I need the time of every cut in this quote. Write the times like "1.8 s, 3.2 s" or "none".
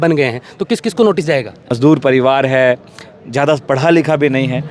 1.7 s